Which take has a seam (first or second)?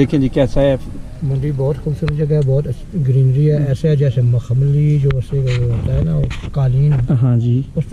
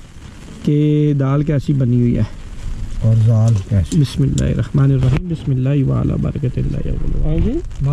second